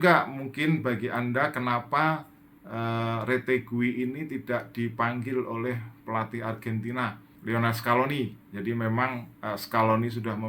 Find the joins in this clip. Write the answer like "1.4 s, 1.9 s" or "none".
7.3 s